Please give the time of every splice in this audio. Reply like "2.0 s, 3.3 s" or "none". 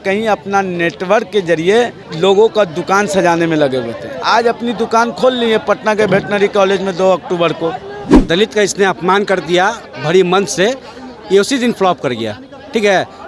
2.0 s, 8.1 s